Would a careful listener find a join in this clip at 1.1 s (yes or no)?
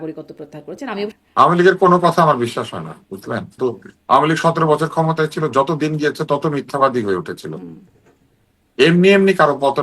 yes